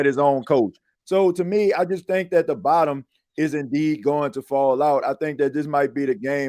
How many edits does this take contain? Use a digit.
0